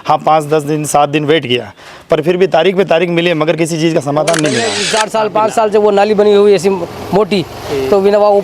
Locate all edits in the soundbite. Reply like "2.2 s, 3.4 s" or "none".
4.8 s